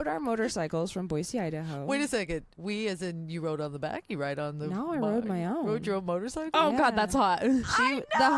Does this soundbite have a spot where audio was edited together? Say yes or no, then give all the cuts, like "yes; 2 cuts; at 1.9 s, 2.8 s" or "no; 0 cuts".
no; 0 cuts